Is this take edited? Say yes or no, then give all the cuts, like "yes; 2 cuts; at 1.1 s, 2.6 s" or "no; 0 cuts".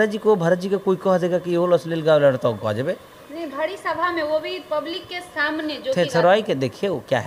no; 0 cuts